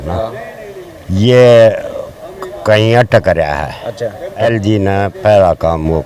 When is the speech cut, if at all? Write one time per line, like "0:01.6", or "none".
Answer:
0:04.5